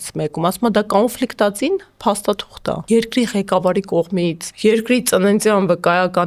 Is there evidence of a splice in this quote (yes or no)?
yes